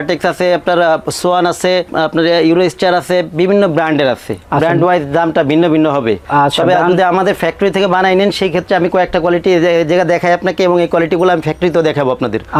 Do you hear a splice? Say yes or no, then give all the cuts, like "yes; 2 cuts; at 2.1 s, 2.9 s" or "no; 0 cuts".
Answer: no; 0 cuts